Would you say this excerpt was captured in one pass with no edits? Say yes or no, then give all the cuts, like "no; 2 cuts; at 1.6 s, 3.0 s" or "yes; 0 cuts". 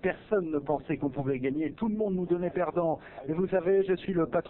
yes; 0 cuts